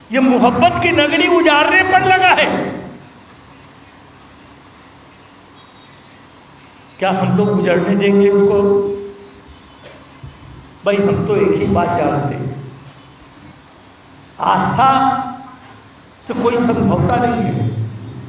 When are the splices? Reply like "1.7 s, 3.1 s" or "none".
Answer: none